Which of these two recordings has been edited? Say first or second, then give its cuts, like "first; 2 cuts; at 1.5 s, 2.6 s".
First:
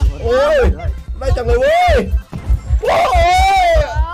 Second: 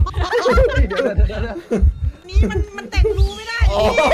second; 1 cut; at 2.3 s